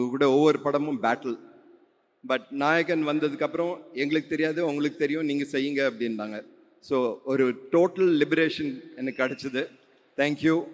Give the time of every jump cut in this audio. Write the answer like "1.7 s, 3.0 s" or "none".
none